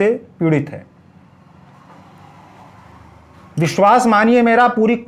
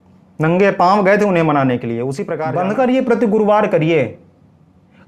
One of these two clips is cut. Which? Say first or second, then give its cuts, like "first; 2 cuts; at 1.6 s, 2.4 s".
second; 1 cut; at 2.2 s